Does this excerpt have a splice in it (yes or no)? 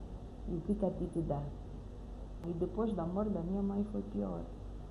yes